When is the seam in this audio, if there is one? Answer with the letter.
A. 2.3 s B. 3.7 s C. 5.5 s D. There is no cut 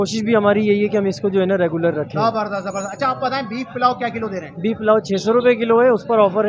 D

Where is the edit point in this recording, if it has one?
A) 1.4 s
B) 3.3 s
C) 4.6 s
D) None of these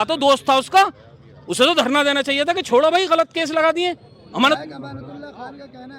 C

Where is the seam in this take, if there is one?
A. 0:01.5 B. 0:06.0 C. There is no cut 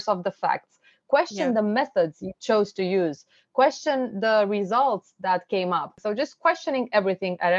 B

